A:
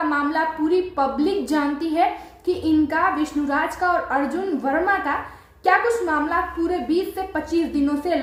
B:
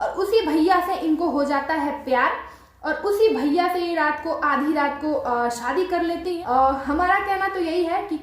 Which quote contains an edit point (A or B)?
B